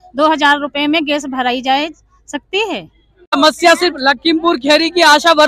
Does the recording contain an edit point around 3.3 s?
yes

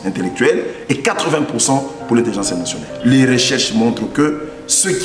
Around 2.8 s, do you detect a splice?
yes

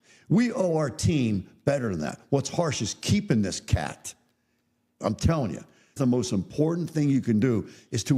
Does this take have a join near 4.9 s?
yes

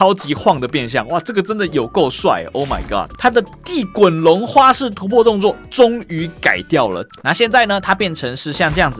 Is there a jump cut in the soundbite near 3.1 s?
yes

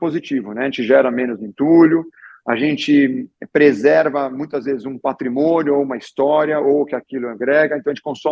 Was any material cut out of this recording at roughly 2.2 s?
no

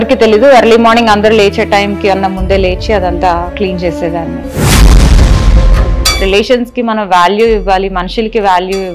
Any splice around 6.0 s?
yes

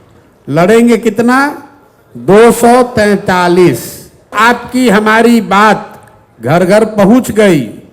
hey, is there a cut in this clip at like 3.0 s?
no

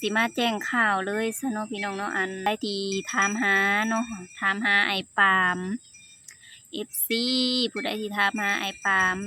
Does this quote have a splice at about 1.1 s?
no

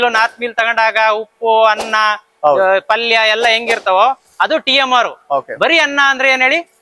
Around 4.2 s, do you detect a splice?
no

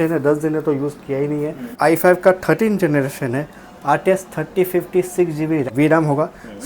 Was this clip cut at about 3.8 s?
no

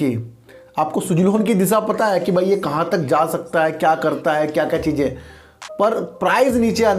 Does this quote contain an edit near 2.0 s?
no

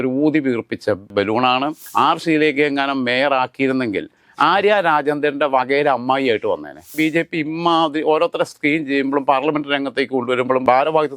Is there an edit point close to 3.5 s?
no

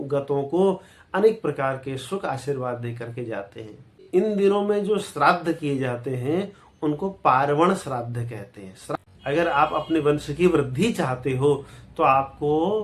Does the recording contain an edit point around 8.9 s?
yes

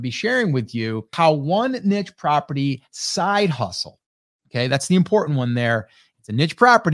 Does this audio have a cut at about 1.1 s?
yes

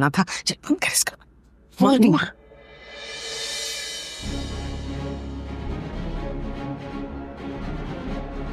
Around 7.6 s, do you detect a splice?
no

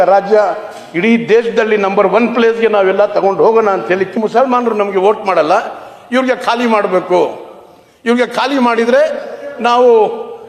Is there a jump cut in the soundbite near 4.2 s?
yes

